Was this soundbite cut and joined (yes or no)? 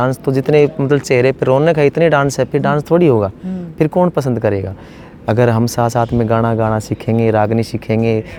no